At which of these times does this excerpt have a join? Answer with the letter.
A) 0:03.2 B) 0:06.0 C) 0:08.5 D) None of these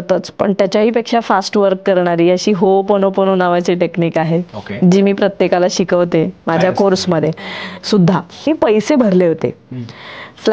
C